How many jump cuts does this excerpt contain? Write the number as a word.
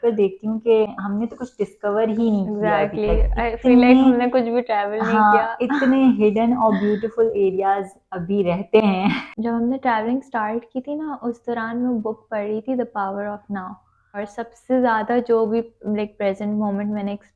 two